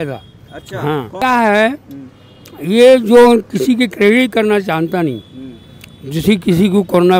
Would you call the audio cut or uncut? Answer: cut